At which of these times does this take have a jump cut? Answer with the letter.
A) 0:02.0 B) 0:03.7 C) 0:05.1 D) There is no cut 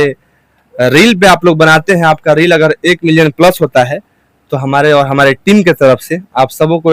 D